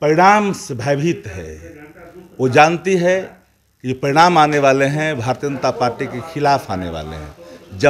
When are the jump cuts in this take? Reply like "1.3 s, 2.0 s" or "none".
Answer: none